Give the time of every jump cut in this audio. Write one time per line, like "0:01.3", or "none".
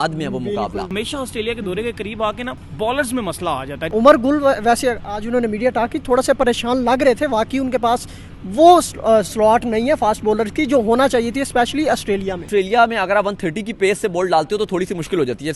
0:00.9
0:02.6
0:03.8
0:12.4